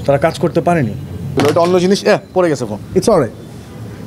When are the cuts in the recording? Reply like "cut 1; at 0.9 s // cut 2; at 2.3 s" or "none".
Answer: cut 1; at 1.3 s